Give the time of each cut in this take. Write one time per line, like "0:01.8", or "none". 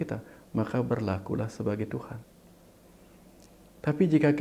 none